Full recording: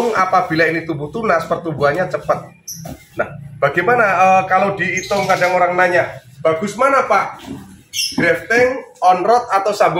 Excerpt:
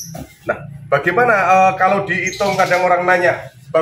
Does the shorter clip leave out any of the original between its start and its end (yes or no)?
no